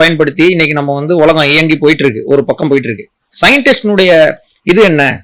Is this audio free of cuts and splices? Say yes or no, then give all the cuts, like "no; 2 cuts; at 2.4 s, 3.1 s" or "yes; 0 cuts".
yes; 0 cuts